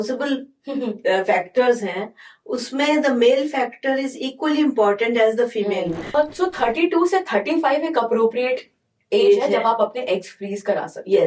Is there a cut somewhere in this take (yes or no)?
yes